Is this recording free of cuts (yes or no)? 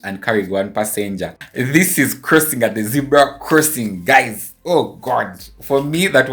no